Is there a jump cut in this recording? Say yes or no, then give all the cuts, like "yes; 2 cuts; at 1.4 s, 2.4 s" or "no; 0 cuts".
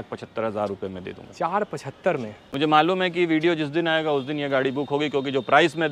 yes; 1 cut; at 2.4 s